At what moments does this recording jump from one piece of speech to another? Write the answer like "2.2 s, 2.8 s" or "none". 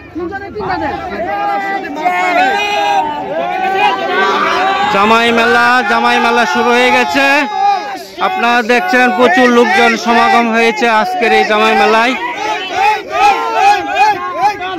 1.0 s